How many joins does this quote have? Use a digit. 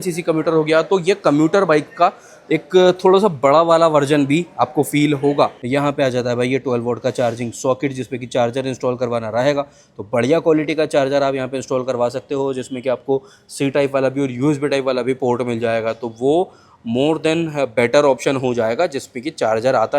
1